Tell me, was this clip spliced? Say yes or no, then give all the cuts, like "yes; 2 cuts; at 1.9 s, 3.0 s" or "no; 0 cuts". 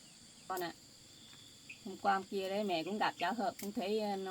no; 0 cuts